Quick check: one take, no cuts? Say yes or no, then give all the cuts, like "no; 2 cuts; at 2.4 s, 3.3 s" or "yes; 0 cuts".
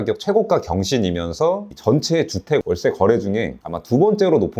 yes; 0 cuts